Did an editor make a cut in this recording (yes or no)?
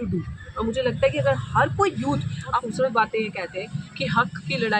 yes